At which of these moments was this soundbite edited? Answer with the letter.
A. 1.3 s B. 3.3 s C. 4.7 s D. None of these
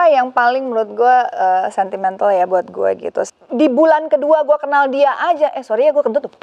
B